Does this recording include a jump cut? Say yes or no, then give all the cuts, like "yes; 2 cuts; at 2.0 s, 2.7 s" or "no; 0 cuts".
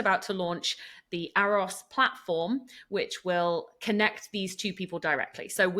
no; 0 cuts